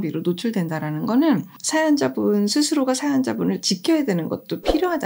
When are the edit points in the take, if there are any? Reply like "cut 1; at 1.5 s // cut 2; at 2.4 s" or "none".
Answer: none

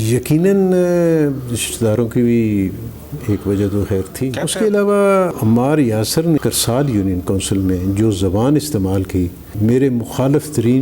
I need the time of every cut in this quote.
cut 1; at 4.4 s // cut 2; at 5.3 s // cut 3; at 6.4 s // cut 4; at 9.5 s

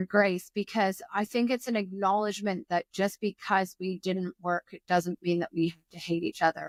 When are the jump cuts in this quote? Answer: none

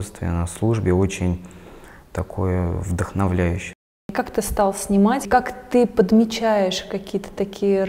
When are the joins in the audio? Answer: cut 1; at 4.1 s // cut 2; at 5.3 s

